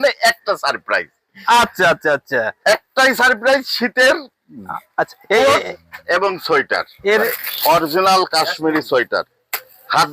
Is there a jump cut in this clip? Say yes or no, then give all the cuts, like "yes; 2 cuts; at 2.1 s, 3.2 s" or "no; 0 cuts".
yes; 1 cut; at 7.2 s